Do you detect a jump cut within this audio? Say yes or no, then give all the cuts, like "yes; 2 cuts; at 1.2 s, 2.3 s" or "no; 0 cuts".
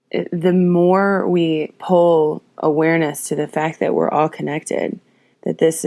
no; 0 cuts